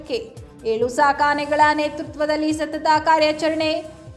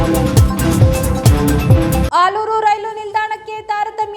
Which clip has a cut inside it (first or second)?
second